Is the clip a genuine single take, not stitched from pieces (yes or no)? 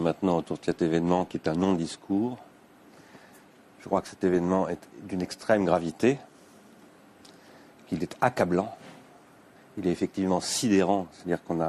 yes